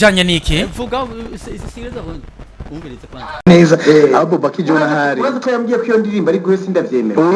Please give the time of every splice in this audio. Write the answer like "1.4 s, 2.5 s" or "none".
none